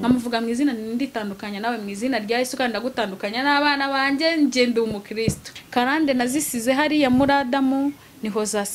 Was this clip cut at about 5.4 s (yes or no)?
yes